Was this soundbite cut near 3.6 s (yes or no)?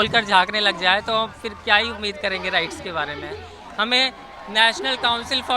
yes